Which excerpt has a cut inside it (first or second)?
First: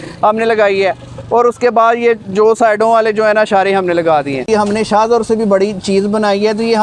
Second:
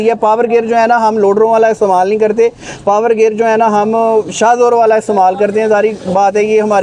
first